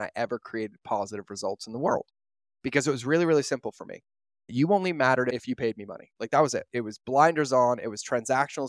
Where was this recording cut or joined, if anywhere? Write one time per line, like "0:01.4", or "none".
0:04.5
0:05.3
0:06.7